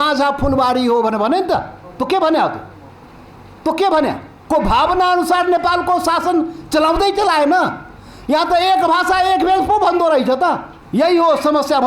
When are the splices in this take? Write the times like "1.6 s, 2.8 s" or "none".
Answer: 4.3 s, 10.7 s

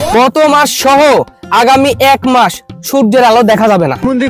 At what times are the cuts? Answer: none

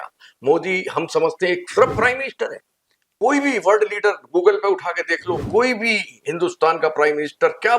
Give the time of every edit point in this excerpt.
3.1 s

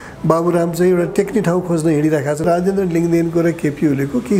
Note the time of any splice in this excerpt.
2.4 s

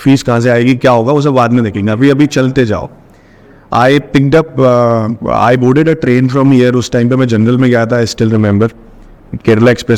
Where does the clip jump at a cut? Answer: none

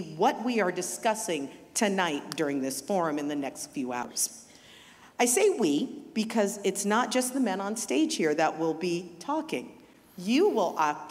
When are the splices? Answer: 4.1 s

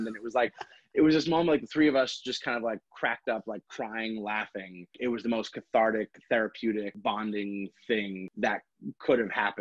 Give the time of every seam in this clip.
4.9 s, 6.9 s, 8.2 s

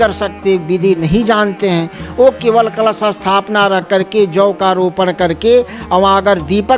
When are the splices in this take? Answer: none

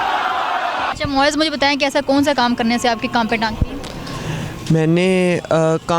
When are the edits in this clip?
none

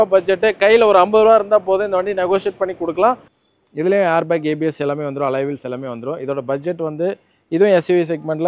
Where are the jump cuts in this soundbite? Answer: 3.3 s

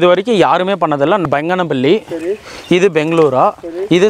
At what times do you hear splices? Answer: 1.2 s

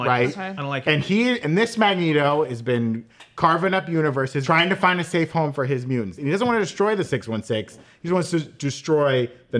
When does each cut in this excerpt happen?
4.4 s, 6.1 s

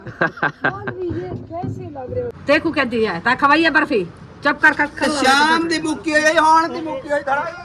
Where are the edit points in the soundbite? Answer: 2.3 s

